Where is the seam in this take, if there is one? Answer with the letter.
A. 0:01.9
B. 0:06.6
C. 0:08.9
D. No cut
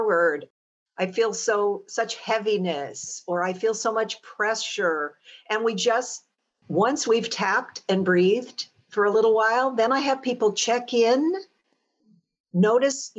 B